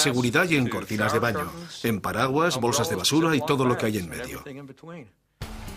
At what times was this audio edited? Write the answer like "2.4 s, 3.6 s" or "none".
2.5 s